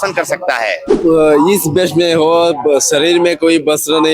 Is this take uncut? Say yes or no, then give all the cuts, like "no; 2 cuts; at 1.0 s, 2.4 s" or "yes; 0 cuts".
no; 1 cut; at 1.0 s